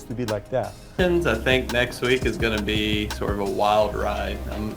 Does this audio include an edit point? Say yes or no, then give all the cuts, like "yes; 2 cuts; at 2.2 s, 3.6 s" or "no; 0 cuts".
yes; 1 cut; at 0.9 s